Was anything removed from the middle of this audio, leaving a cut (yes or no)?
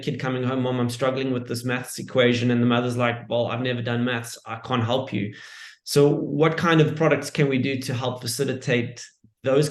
no